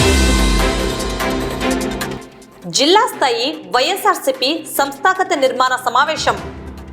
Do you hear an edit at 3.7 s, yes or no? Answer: no